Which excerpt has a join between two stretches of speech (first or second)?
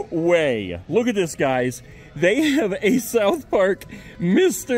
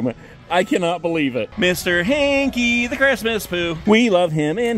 second